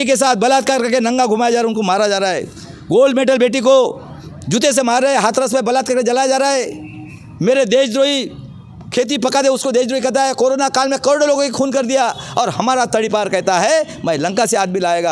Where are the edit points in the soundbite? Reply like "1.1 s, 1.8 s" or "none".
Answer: none

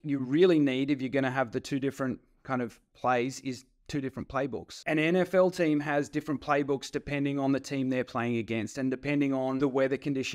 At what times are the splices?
4.7 s, 9.6 s

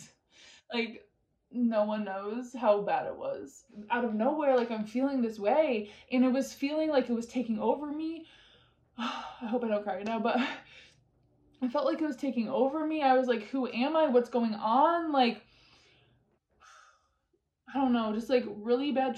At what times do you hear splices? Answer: 3.8 s

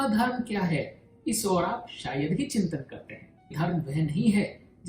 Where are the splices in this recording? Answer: 3.5 s

